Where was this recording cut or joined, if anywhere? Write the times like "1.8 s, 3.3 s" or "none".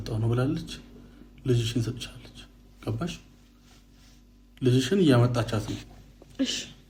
none